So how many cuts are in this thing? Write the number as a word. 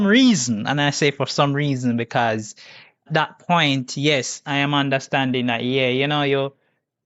one